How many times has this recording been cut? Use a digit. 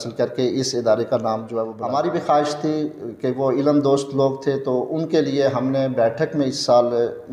1